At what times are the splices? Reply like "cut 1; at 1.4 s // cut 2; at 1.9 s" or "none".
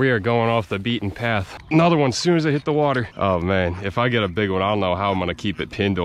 cut 1; at 1.5 s // cut 2; at 3.1 s